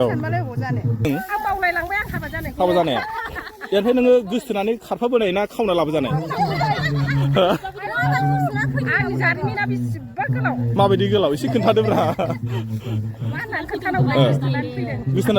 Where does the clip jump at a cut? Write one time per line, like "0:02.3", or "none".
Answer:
0:01.1